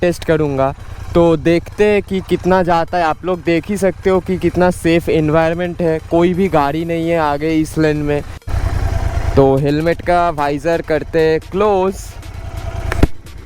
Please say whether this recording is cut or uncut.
cut